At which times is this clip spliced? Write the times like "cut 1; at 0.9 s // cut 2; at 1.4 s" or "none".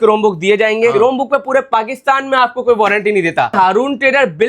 cut 1; at 0.9 s // cut 2; at 3.5 s